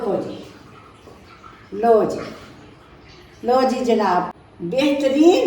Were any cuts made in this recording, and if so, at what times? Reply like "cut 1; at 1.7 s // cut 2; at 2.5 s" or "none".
cut 1; at 4.4 s

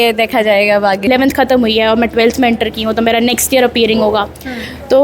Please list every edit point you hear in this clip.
cut 1; at 1.1 s

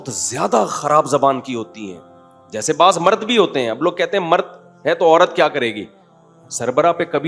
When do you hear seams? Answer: none

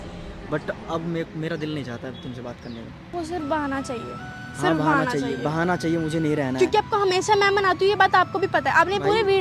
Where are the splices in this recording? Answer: cut 1; at 3.1 s

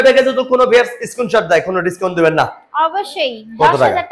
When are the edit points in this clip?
none

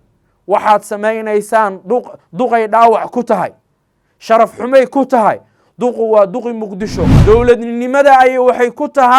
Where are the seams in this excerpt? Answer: cut 1; at 7.1 s

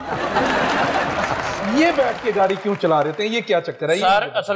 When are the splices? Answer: cut 1; at 1.5 s

